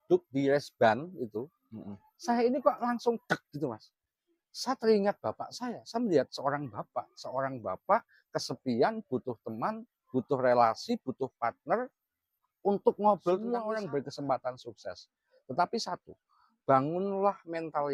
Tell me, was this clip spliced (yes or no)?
yes